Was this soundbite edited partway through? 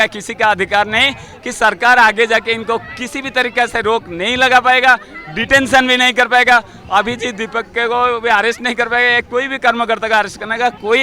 no; 0 cuts

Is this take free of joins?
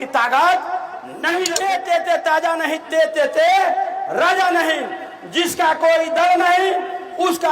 no; 1 cut; at 1.5 s

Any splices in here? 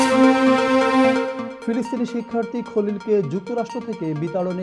no; 0 cuts

